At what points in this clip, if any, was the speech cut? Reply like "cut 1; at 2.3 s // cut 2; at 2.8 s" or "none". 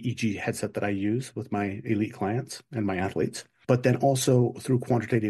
cut 1; at 3.5 s